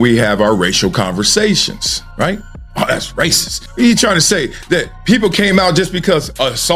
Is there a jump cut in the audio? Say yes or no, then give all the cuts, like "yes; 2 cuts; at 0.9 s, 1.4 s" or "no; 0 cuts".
yes; 1 cut; at 3.6 s